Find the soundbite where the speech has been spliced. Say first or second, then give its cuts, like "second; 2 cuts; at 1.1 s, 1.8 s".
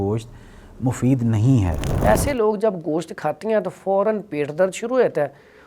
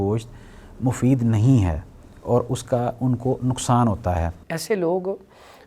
first; 1 cut; at 1.8 s